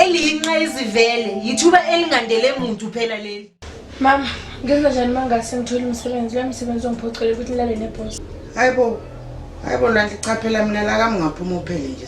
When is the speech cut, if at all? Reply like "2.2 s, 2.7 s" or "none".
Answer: 3.2 s